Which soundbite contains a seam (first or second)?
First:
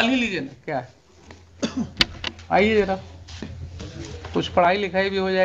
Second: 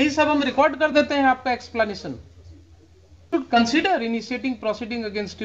second